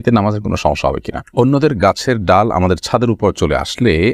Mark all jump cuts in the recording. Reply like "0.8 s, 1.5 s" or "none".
1.2 s

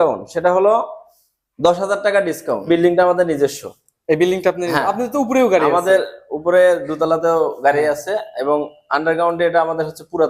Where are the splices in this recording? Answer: 2.7 s

